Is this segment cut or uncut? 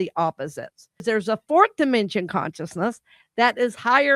cut